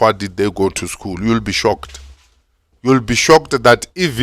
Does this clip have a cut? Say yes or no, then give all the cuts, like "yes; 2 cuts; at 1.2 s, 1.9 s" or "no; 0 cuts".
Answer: no; 0 cuts